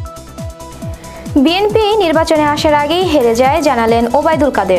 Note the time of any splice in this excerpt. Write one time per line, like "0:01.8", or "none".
0:01.3